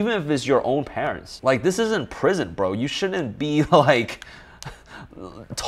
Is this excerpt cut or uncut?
uncut